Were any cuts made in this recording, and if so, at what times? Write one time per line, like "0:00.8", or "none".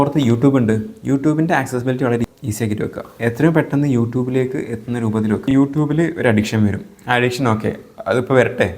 0:02.4
0:05.5